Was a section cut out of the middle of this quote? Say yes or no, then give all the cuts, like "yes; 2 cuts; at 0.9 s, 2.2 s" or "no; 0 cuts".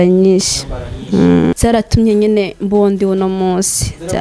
yes; 1 cut; at 1.5 s